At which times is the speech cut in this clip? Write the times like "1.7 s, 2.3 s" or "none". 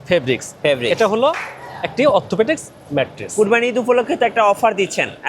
3.3 s

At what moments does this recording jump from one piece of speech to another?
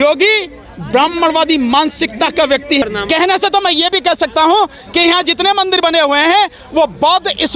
2.8 s

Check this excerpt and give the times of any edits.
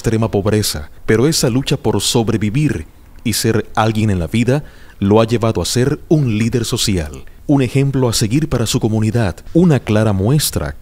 4.3 s

